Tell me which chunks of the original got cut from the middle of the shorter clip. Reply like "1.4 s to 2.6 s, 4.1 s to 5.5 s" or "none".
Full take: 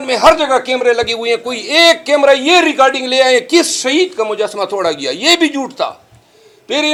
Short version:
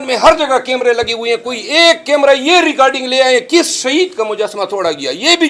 none